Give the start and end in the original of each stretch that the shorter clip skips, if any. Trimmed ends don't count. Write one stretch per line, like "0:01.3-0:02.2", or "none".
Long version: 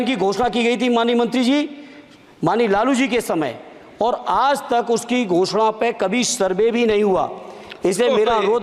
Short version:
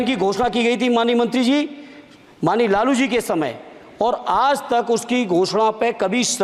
none